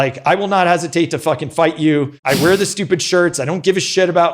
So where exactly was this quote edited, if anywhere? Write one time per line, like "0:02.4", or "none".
0:02.1